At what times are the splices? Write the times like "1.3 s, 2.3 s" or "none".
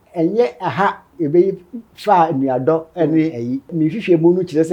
1.1 s, 3.7 s